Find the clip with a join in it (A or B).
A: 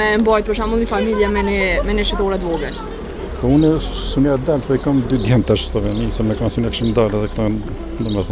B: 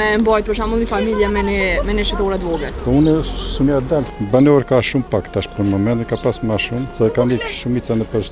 B